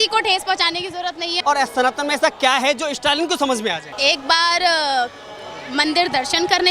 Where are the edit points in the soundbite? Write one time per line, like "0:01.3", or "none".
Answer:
0:01.3
0:03.9